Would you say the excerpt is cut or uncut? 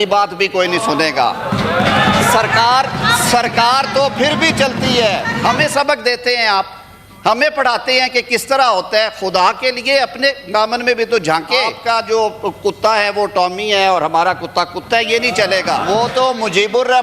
cut